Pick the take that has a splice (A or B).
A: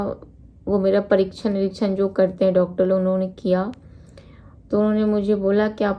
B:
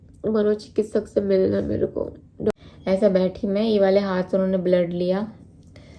B